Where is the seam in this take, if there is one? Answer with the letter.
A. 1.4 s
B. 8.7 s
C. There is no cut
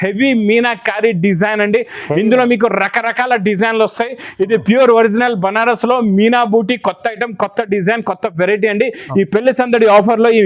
C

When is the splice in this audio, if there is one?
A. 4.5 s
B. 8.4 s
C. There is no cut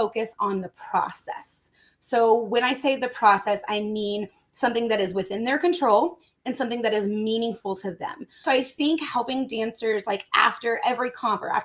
B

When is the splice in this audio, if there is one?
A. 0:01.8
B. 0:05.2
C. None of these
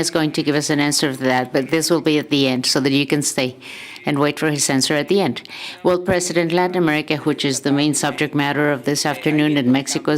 B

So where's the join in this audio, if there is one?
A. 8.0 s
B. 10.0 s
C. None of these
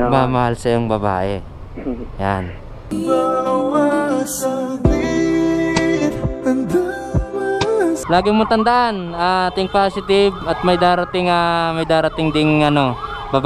A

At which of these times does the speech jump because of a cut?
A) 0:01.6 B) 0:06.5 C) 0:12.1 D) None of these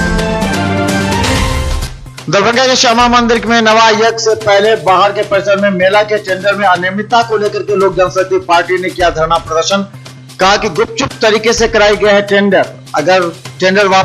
A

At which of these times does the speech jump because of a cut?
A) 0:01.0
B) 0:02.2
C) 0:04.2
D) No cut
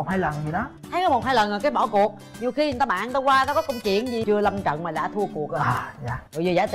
C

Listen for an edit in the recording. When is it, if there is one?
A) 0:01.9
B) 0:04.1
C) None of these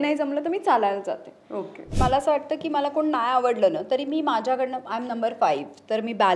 A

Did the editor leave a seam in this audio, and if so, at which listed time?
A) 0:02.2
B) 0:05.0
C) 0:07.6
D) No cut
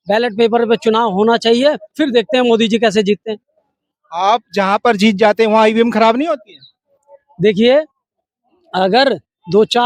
D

